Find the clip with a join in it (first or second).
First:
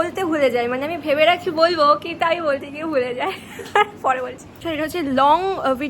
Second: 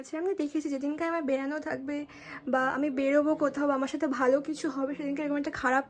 first